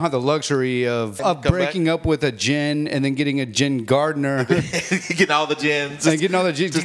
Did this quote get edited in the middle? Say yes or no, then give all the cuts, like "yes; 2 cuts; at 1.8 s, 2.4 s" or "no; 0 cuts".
yes; 1 cut; at 1.2 s